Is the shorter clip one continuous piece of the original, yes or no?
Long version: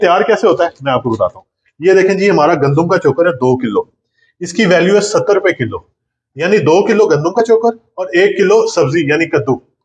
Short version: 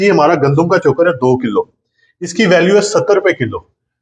yes